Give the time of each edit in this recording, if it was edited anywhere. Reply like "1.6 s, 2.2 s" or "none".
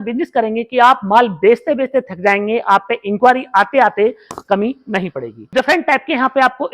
5.5 s

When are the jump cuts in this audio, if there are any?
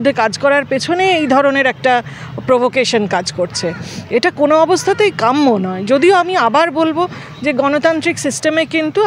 none

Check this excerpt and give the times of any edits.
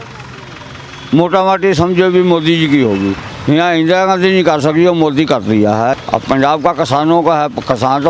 3.3 s, 6.0 s

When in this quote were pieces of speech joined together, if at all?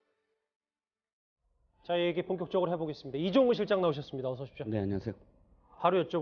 4.1 s

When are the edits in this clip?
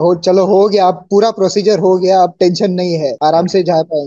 3.1 s

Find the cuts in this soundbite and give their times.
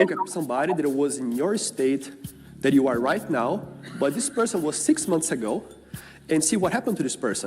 none

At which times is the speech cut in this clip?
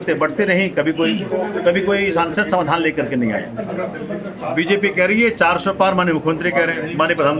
3.5 s

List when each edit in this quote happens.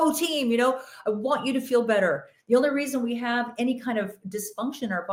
none

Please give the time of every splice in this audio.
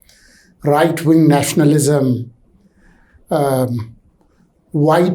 none

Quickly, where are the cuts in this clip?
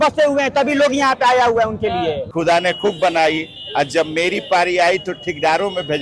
2.2 s

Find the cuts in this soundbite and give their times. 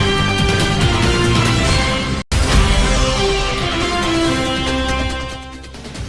2.2 s

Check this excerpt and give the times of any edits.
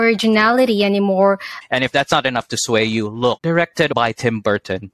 1.5 s, 3.9 s

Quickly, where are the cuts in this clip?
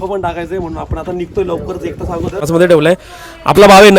2.4 s

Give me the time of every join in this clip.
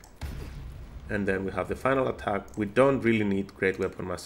none

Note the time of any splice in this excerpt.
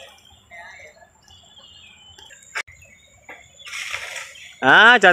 2.6 s

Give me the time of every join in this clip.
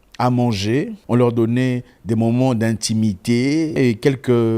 1.0 s, 3.8 s

